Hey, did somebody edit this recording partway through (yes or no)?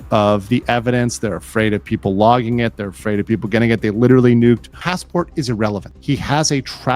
yes